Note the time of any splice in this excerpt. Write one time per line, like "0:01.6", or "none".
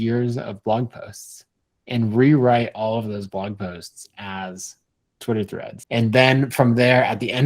0:05.8